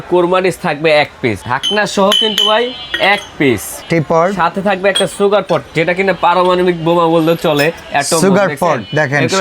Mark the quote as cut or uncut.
cut